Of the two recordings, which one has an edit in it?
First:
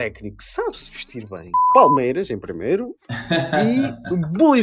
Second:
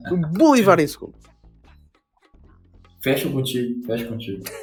first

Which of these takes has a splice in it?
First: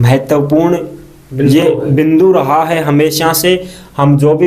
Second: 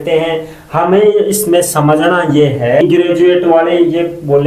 second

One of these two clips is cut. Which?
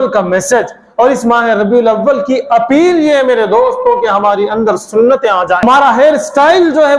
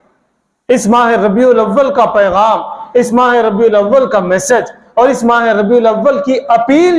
first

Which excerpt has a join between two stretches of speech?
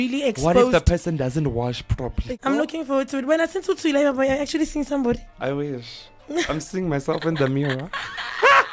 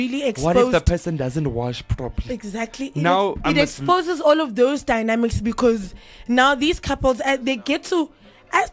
first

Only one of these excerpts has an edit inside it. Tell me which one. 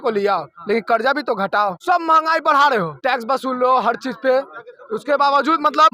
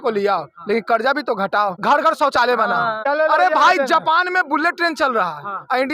second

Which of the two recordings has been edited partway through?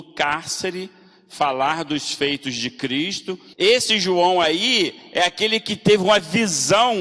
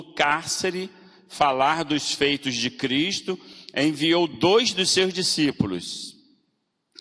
first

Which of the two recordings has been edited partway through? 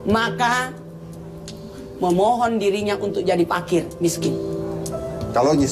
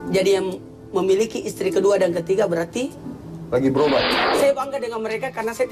second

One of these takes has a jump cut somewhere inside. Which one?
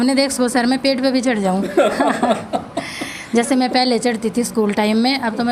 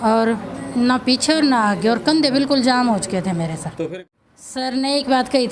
second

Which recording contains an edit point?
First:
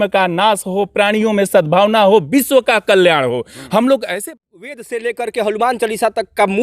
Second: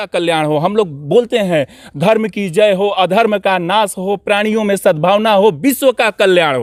first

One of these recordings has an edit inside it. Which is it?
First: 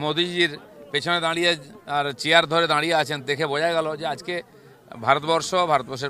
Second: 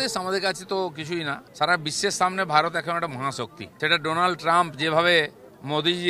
second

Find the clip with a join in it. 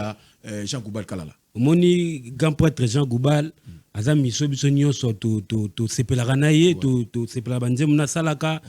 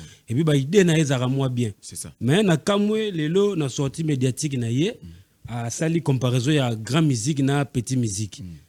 first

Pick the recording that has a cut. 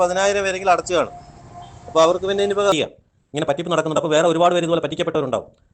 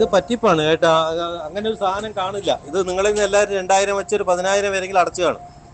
first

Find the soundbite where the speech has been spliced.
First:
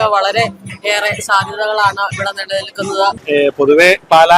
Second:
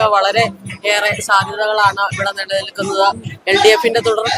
first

